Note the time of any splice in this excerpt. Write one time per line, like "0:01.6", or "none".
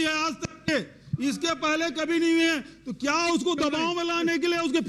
none